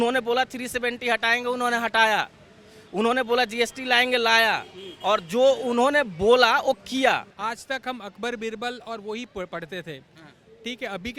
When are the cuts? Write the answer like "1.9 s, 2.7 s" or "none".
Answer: 7.4 s